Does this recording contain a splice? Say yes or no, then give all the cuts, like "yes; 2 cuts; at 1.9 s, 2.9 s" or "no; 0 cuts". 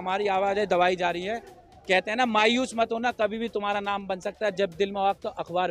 no; 0 cuts